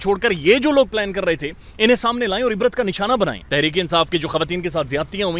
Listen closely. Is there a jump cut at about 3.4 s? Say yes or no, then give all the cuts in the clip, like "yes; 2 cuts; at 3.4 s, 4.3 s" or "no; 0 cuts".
yes; 1 cut; at 3.4 s